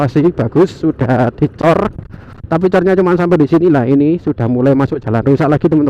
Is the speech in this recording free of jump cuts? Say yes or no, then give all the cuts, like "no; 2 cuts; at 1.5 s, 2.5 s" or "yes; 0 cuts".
yes; 0 cuts